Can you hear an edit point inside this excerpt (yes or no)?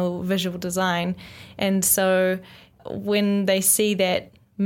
yes